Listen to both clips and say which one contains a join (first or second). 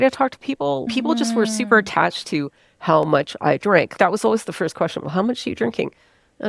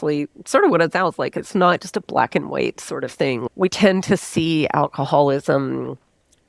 first